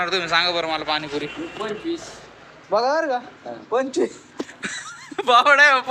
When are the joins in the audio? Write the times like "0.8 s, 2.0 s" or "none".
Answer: none